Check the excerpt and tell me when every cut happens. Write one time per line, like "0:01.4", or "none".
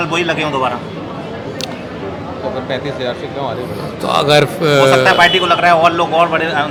none

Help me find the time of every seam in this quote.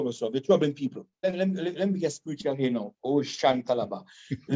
0:01.2

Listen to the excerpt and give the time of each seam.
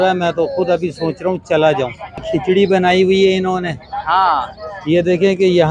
0:02.2

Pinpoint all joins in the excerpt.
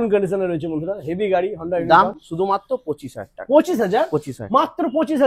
none

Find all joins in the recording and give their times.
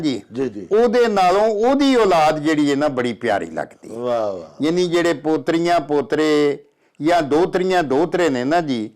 none

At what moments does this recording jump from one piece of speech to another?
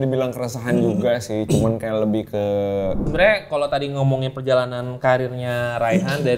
0:03.1

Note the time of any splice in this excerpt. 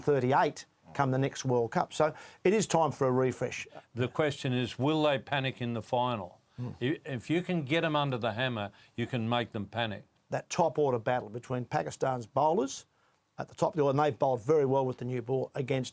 0:03.6
0:10.2

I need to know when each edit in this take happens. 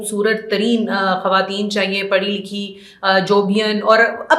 none

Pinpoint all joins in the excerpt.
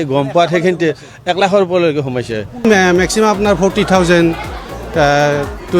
0:02.6

